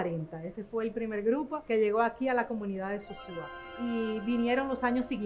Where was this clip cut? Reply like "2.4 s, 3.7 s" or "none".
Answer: 1.6 s, 3.7 s